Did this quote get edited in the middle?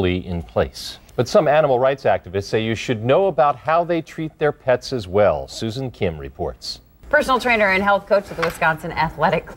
no; 0 cuts

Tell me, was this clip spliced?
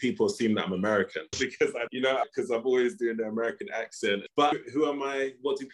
yes; 2 cuts; at 1.9 s, 4.2 s

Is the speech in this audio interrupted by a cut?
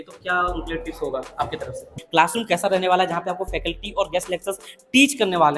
yes; 1 cut; at 1.9 s

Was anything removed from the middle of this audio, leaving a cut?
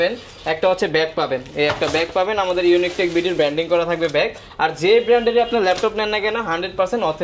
no; 0 cuts

